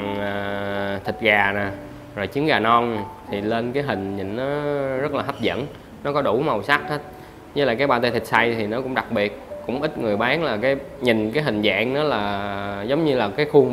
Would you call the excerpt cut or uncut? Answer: uncut